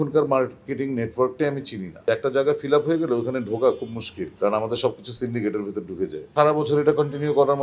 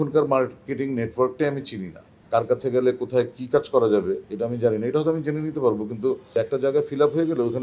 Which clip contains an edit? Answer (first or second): first